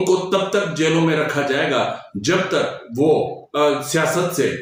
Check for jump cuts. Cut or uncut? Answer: uncut